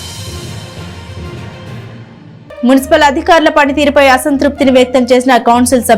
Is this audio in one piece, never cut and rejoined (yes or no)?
yes